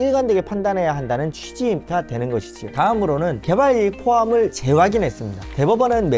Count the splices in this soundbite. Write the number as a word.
one